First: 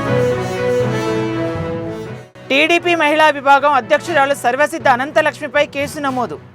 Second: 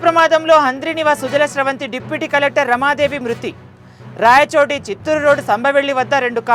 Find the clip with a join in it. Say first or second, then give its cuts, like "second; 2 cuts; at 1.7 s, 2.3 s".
first; 1 cut; at 1.9 s